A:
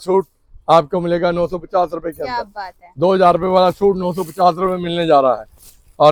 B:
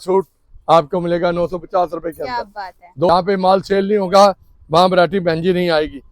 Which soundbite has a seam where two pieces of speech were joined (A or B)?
B